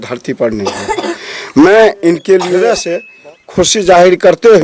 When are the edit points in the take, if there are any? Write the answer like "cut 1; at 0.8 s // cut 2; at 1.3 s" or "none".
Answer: cut 1; at 2.8 s